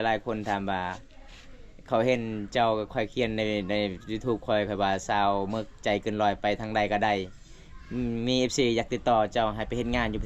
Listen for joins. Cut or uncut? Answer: uncut